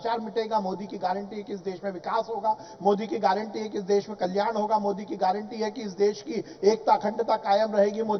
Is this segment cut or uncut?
uncut